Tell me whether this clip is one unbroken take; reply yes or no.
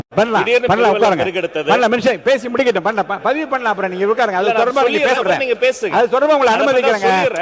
yes